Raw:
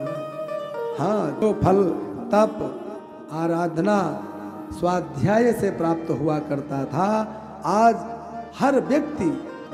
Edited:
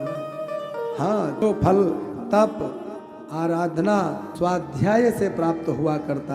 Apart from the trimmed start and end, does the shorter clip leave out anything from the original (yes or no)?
yes